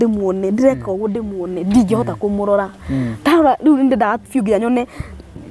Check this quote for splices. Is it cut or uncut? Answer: uncut